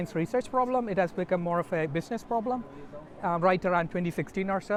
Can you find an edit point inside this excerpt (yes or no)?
no